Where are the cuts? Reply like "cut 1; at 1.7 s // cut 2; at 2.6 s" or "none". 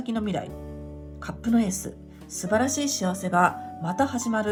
none